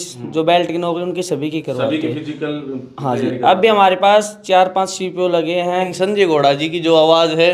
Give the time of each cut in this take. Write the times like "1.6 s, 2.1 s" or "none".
5.9 s